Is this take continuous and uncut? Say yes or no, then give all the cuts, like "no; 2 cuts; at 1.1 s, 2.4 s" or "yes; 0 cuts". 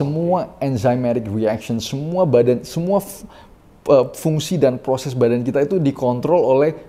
yes; 0 cuts